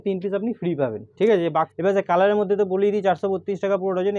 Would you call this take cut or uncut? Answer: cut